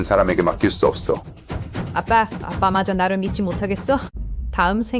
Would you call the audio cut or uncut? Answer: cut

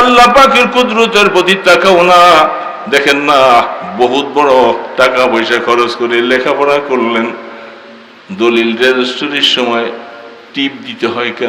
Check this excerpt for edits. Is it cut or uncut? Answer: uncut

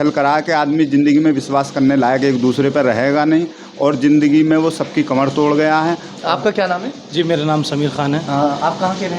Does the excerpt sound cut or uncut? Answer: uncut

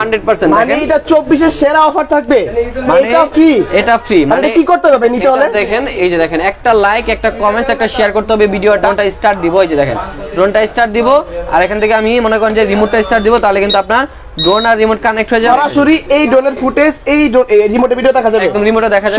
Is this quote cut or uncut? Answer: cut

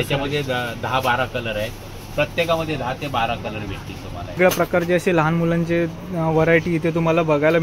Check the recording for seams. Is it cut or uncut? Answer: cut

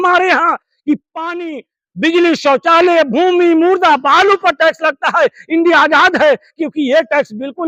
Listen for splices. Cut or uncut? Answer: uncut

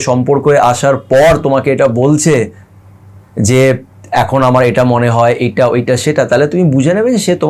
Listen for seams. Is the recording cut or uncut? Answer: uncut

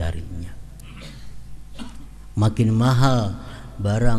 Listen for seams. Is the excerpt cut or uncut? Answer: uncut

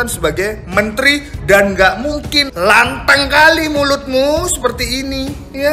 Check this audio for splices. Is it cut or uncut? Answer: uncut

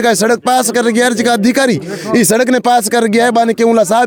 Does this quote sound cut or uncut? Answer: uncut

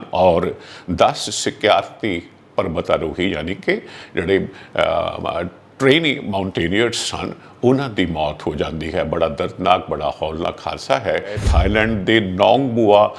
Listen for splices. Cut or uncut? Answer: cut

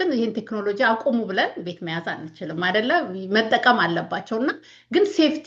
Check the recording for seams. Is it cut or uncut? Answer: uncut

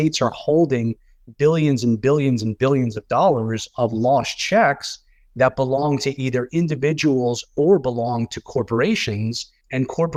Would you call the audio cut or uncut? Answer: uncut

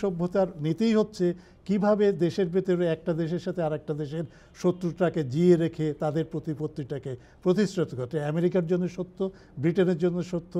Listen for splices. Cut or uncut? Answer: uncut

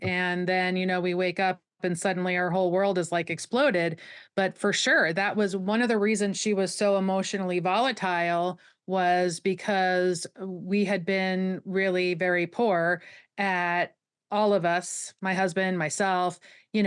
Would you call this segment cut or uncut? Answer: uncut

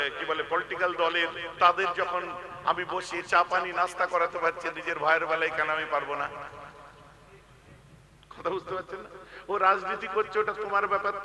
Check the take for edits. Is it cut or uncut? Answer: uncut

